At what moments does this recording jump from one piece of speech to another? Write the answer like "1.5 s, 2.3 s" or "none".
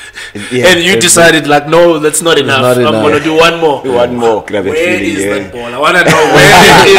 4.5 s